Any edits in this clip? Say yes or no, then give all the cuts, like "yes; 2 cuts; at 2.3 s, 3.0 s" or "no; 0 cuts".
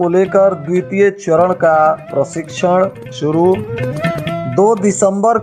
no; 0 cuts